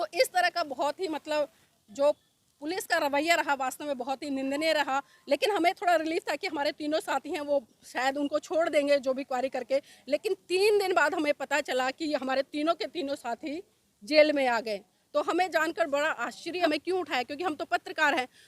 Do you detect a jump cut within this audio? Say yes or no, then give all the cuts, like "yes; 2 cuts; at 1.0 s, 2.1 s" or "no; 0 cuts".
yes; 1 cut; at 16.7 s